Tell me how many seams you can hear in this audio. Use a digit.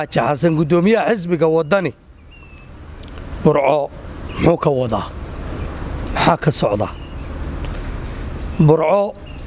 0